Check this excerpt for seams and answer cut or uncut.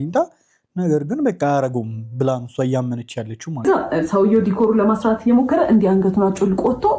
cut